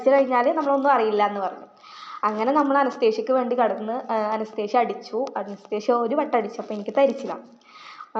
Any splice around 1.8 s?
no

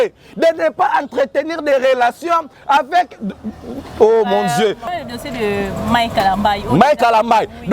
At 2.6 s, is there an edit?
no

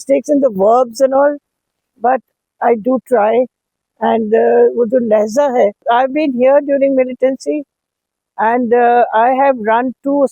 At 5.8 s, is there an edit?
yes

